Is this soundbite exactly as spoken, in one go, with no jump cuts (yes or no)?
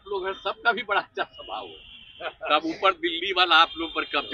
yes